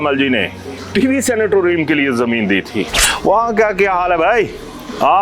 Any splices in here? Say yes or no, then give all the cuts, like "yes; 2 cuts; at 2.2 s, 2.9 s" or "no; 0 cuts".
yes; 1 cut; at 3.0 s